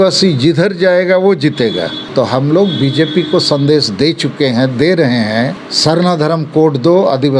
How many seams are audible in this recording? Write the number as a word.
two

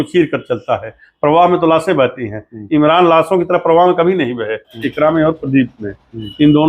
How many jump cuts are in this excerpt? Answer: one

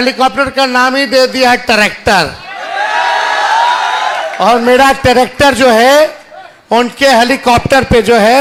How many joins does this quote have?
zero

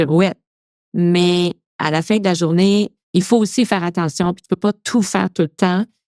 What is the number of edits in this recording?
one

